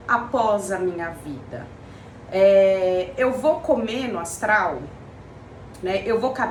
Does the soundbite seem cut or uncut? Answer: uncut